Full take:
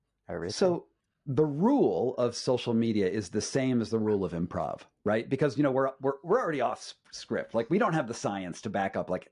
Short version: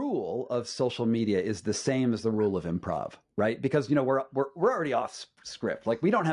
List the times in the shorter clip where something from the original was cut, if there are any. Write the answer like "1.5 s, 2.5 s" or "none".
none

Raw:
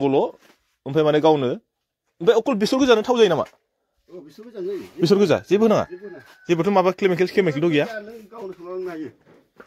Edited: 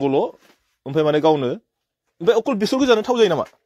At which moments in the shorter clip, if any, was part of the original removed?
none

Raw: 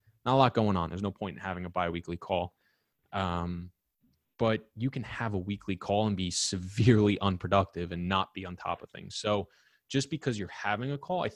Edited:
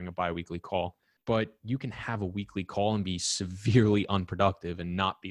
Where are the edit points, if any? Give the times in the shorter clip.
1.1 s

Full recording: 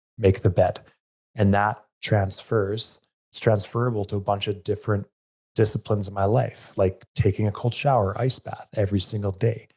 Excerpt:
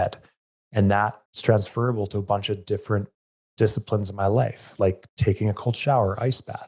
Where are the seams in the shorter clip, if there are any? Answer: 1.3 s

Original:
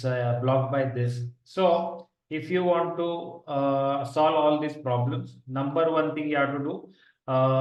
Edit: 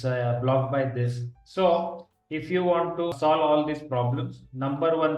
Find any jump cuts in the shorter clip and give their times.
3.1 s

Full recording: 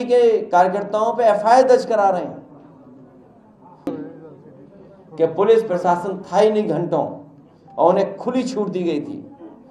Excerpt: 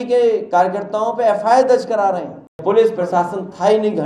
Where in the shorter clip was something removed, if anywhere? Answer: 2.6 s

